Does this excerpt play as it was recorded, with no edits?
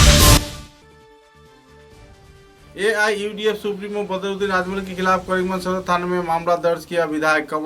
no; 1 cut; at 2.3 s

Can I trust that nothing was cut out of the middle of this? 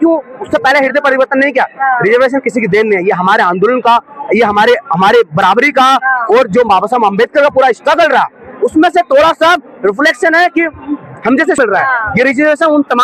no; 1 cut; at 11.6 s

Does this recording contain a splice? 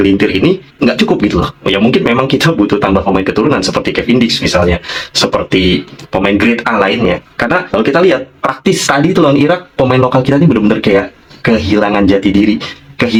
no; 0 cuts

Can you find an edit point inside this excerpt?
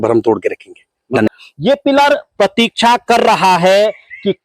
yes; 1 cut; at 1.3 s

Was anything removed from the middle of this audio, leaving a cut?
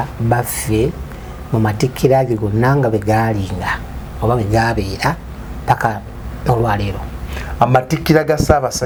no; 0 cuts

